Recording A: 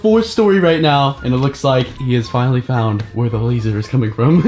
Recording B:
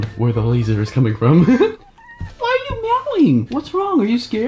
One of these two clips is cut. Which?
B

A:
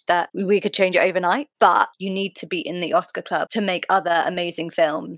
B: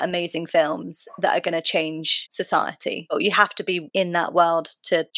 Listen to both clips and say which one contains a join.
A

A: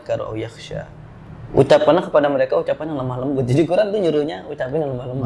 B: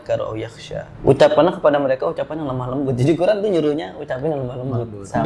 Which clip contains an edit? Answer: B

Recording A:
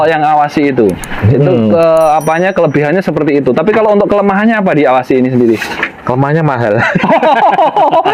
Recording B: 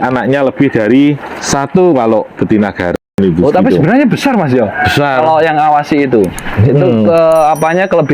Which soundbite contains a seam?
B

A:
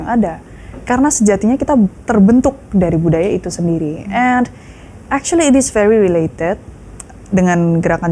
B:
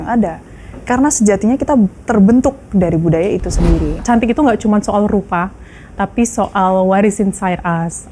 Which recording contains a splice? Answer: B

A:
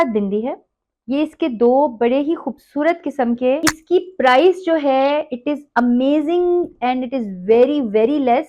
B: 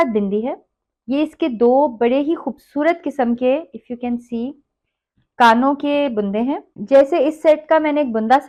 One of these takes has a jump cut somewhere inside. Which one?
A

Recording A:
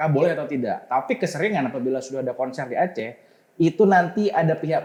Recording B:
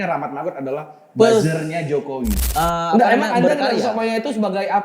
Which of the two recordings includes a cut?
B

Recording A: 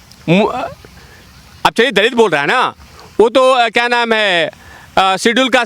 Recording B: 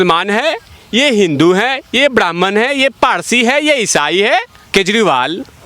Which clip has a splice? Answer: B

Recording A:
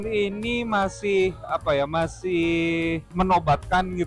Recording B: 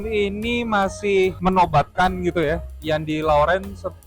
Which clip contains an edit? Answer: B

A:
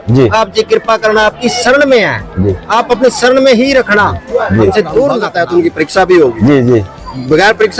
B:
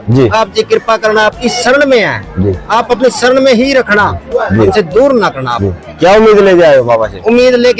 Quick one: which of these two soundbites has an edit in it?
A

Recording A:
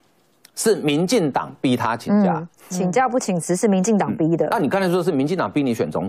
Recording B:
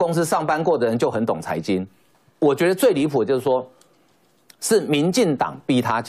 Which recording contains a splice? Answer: B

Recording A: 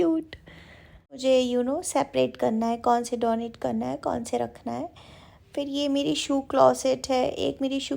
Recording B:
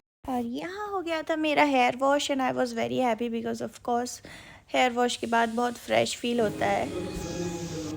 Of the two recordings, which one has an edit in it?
A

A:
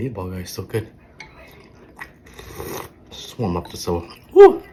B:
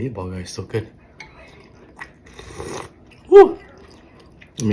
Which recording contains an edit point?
B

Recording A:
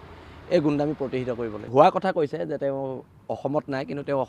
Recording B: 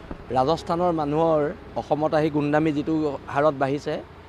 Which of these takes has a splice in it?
A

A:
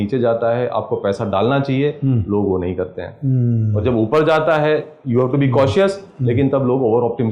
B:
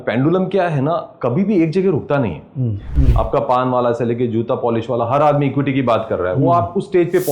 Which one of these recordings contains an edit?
B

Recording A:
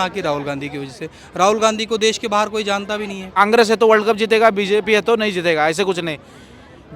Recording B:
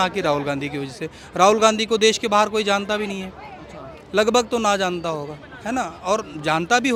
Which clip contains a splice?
A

